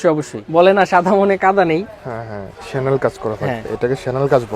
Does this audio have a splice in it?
yes; 1 cut; at 2.5 s

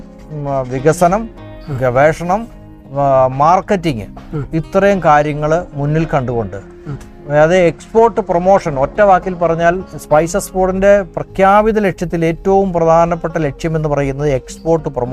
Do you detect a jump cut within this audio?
no; 0 cuts

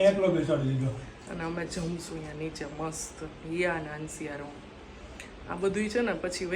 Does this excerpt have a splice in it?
no; 0 cuts

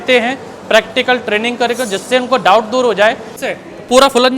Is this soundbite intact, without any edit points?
no; 1 cut; at 3.3 s

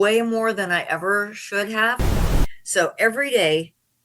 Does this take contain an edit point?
yes; 1 cut; at 2.1 s

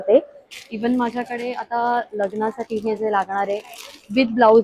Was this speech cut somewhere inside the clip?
no; 0 cuts

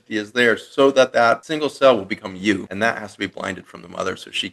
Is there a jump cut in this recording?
yes; 2 cuts; at 1.5 s, 2.7 s

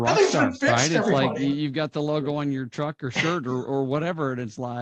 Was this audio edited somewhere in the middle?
no; 0 cuts

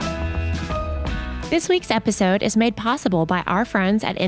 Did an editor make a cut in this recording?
yes; 1 cut; at 1.4 s

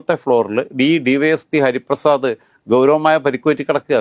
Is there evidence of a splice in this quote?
no; 0 cuts

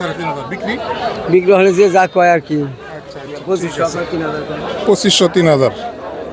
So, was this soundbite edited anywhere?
no; 0 cuts

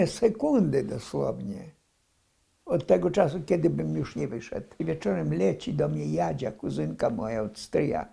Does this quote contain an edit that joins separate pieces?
yes; 1 cut; at 4.8 s

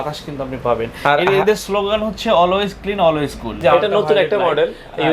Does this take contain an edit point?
yes; 1 cut; at 3.6 s

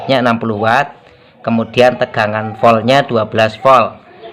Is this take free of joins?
yes; 0 cuts

